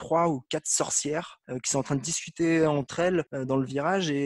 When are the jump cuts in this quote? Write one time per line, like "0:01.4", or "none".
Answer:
none